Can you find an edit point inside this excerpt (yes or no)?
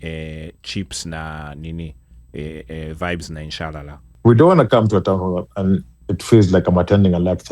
yes